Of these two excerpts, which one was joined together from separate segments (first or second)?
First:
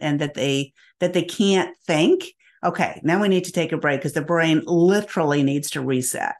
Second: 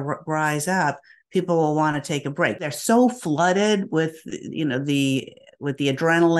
second